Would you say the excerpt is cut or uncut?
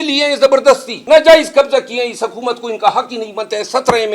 cut